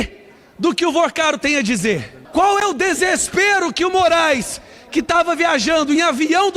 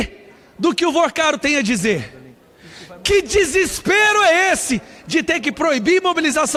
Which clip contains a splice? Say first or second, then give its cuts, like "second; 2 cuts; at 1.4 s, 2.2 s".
first; 1 cut; at 2.2 s